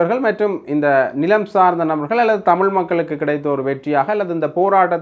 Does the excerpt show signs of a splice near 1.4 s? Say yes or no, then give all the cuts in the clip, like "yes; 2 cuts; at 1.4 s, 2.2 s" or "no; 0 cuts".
no; 0 cuts